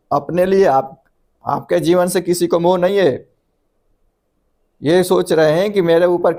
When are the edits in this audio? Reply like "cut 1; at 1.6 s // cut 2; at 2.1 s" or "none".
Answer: none